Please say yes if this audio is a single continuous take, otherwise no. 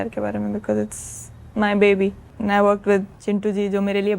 no